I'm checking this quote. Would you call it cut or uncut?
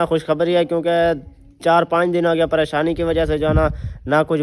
uncut